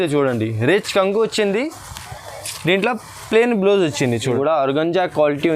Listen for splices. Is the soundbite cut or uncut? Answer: cut